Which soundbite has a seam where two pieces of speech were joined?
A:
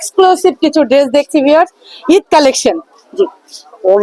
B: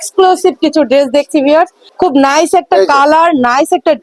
B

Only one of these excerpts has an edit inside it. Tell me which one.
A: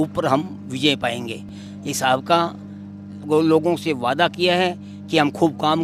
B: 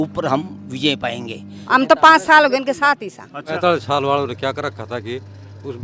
B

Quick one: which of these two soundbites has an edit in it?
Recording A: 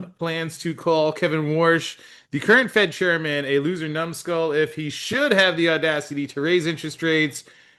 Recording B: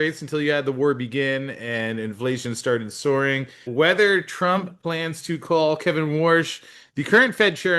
B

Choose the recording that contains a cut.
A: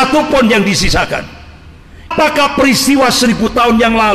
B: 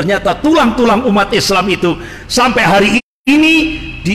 A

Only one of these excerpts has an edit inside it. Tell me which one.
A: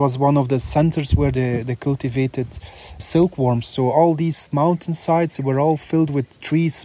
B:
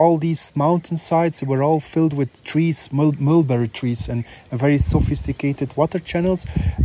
A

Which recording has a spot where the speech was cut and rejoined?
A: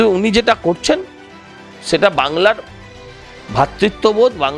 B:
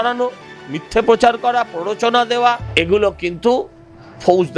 B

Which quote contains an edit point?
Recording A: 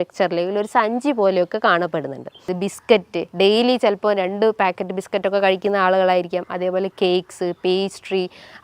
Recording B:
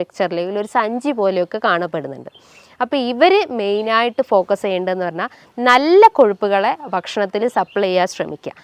A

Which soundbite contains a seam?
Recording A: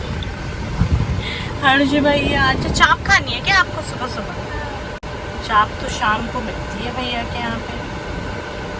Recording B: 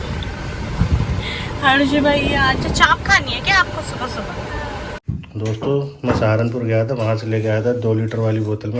B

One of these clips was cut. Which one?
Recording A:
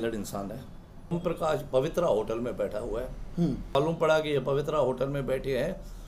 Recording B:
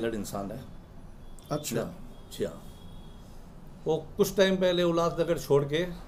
A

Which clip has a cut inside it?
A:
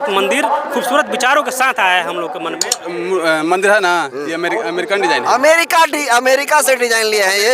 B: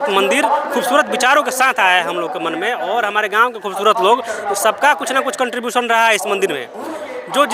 A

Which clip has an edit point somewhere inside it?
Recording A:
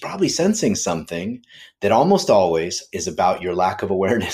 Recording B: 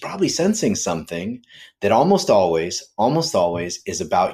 A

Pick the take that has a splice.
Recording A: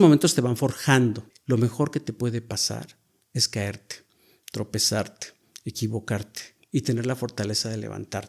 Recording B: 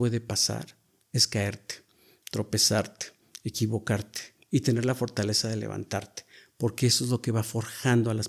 A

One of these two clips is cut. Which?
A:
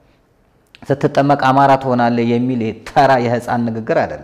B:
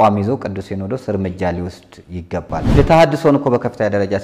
B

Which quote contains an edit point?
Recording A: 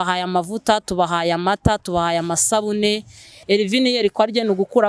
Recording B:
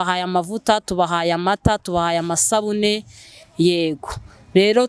A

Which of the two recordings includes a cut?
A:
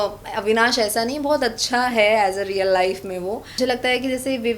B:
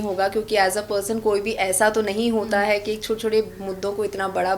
A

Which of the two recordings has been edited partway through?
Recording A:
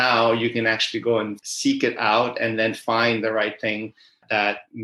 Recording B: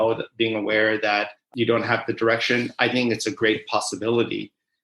B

